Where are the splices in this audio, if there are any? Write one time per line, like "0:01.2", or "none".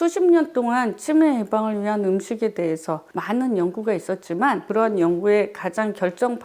0:03.1
0:04.7